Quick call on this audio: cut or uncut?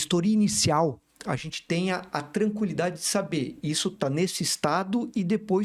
uncut